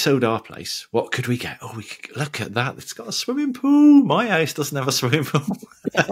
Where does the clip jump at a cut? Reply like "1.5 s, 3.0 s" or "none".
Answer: none